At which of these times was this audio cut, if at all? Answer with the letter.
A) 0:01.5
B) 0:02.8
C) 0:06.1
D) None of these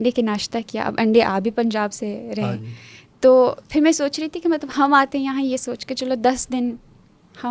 D